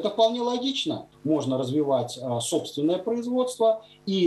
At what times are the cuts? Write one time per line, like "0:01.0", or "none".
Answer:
0:01.1